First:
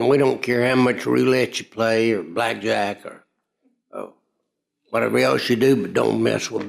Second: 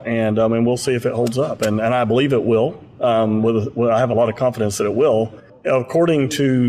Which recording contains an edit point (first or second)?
second